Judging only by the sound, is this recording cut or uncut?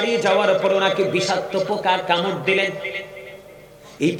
uncut